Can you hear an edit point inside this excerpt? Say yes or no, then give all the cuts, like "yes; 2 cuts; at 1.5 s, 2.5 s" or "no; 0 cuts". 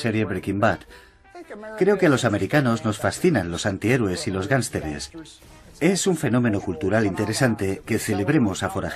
no; 0 cuts